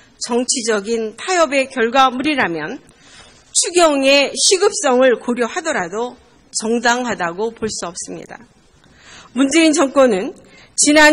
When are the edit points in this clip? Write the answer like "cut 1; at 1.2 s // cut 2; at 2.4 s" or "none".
cut 1; at 8.4 s